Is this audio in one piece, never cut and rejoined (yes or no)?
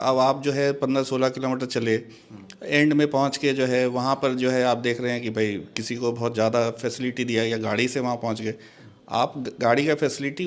yes